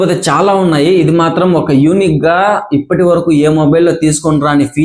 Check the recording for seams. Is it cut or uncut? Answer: uncut